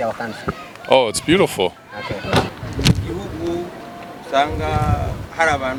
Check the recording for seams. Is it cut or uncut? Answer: uncut